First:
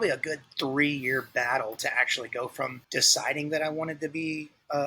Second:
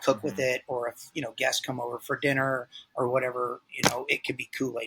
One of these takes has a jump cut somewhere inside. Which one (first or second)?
first